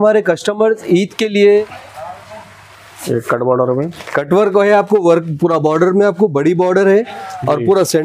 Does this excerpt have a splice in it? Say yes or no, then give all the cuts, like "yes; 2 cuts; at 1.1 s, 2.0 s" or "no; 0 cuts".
yes; 1 cut; at 1.7 s